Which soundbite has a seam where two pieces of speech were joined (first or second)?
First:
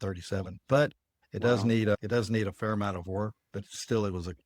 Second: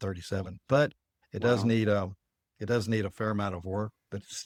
first